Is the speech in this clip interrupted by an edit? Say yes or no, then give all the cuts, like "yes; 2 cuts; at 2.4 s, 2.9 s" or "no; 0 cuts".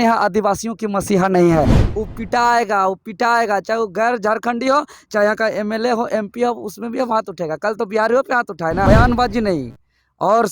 yes; 2 cuts; at 1.8 s, 8.9 s